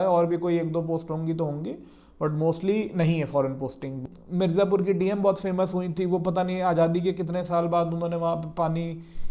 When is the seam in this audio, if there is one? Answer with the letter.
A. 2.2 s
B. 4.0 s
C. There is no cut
B